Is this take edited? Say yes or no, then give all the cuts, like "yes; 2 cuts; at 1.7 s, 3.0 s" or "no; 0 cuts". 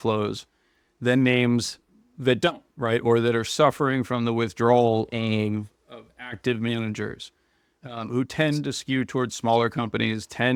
no; 0 cuts